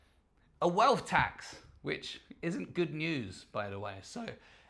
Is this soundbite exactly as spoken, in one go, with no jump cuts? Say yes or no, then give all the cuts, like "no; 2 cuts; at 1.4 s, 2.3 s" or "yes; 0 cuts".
yes; 0 cuts